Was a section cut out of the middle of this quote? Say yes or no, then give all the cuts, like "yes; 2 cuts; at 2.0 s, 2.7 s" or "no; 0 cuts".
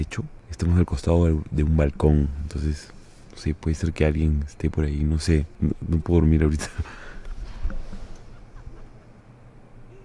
no; 0 cuts